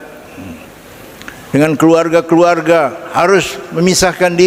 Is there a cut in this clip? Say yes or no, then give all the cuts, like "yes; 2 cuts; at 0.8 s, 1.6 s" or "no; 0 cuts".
no; 0 cuts